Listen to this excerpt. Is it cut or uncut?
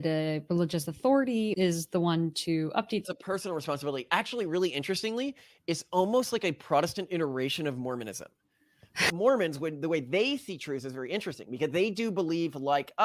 cut